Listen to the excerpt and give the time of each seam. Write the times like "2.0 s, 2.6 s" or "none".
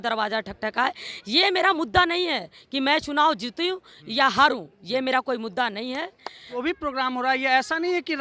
6.5 s